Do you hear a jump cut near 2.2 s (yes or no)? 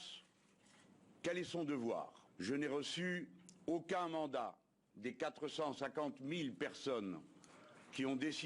yes